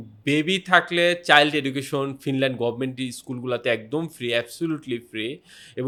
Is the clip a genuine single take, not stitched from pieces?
yes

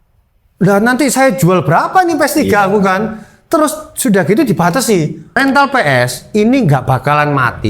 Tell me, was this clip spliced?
yes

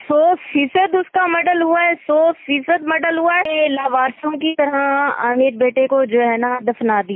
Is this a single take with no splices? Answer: no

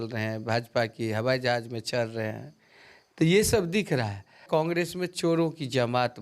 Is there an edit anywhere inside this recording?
yes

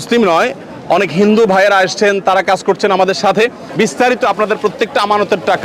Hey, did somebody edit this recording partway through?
yes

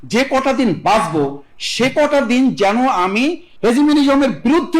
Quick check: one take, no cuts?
no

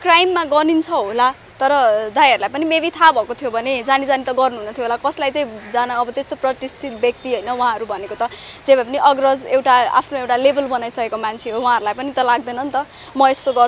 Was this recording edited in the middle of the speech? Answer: no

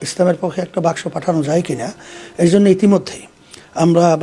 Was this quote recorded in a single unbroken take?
yes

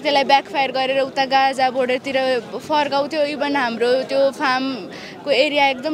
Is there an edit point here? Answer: no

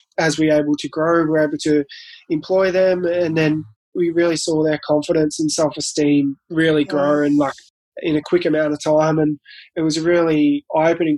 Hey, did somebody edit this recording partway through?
no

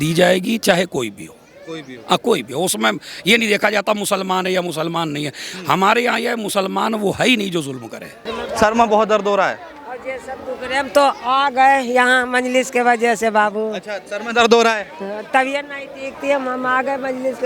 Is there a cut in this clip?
no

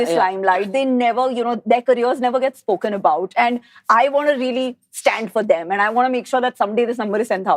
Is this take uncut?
yes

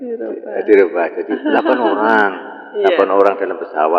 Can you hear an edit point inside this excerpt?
no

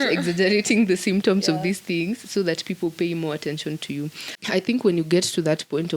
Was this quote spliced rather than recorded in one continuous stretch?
yes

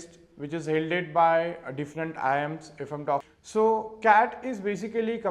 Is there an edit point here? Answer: yes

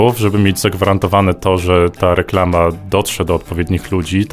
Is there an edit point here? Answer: no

